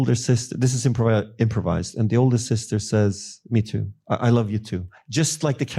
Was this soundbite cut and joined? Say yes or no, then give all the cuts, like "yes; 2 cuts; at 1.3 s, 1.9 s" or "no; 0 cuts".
yes; 1 cut; at 3.4 s